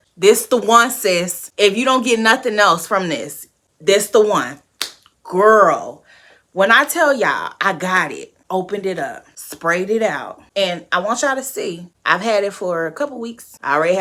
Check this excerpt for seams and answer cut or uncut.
uncut